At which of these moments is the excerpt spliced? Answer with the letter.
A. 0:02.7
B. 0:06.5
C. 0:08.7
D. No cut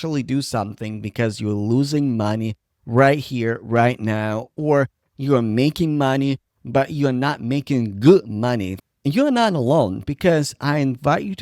C